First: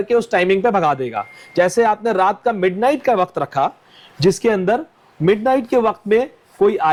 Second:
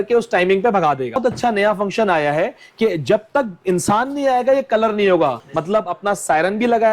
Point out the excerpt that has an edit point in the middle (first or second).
second